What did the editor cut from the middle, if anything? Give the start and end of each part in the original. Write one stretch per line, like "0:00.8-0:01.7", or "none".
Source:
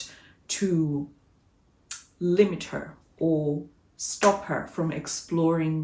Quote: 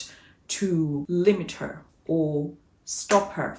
0:01.1-0:02.2

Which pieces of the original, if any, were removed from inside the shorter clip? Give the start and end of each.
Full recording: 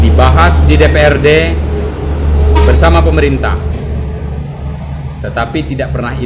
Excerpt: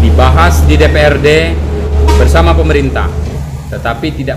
0:01.9-0:02.4
0:03.9-0:04.9

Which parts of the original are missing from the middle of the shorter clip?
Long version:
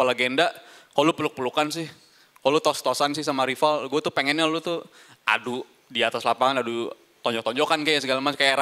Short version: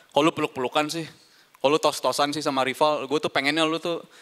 none

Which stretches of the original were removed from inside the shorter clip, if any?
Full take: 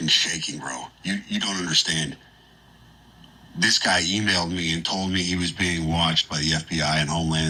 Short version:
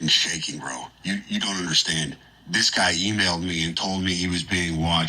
0:02.3-0:03.4

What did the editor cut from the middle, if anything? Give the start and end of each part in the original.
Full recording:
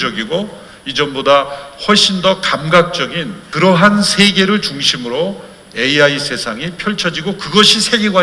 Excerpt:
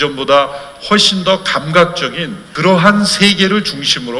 none

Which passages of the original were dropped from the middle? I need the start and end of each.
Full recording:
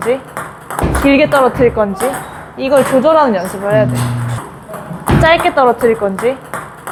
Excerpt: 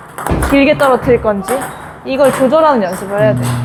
none

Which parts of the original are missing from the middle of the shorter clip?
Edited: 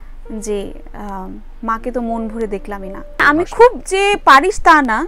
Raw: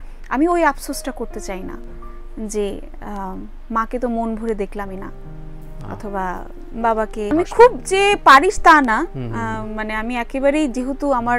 0:05.3-0:07.3

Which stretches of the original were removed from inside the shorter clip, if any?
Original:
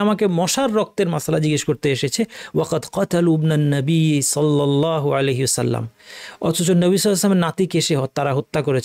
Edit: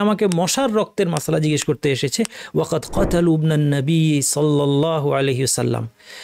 none

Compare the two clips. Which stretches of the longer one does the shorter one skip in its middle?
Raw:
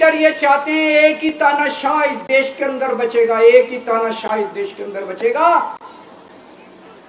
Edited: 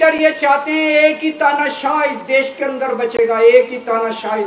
none

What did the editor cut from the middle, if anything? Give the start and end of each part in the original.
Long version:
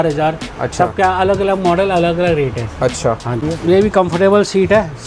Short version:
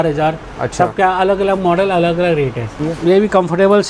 0:02.7-0:03.3

